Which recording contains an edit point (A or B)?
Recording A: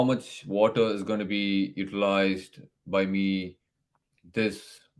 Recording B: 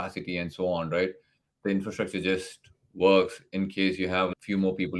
B